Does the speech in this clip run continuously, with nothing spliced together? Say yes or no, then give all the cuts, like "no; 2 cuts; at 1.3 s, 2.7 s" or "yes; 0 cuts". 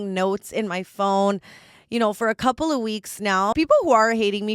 no; 1 cut; at 3.5 s